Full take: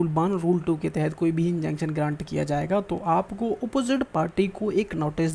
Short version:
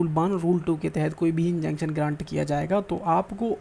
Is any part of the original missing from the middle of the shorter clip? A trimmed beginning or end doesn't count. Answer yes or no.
no